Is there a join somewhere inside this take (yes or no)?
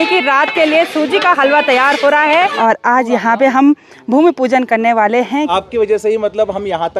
yes